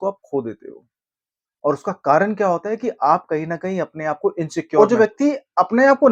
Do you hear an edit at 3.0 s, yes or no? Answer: no